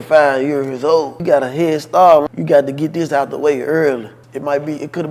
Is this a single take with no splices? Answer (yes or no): no